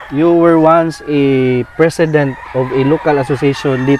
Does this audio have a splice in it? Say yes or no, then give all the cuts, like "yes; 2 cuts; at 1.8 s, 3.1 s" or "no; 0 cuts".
no; 0 cuts